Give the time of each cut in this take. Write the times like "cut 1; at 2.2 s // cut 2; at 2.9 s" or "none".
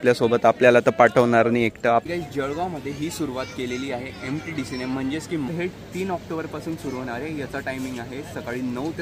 cut 1; at 2.0 s // cut 2; at 5.5 s